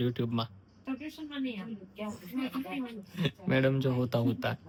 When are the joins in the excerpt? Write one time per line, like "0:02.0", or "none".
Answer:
none